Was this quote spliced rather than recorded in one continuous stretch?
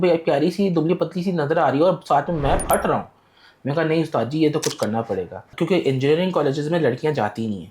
yes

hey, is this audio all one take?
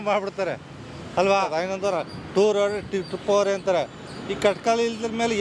no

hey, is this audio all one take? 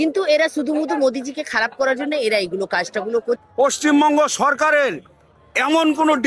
no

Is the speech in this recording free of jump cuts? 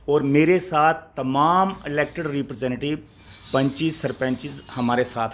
yes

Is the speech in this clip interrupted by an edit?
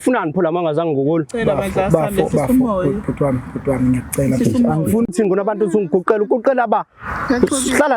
yes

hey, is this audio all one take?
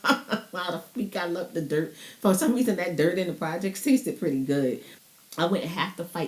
no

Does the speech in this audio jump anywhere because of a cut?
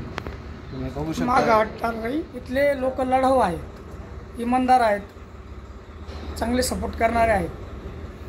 yes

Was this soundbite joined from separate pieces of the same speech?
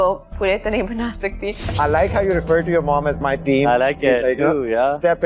yes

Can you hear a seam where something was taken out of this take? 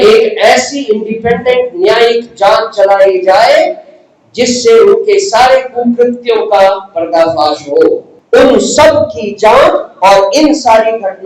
yes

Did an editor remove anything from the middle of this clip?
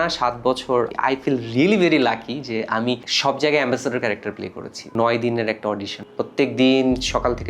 yes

